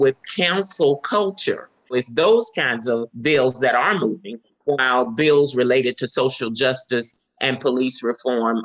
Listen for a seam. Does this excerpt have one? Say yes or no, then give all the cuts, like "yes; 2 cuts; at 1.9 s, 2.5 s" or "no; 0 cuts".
yes; 2 cuts; at 1.9 s, 3.1 s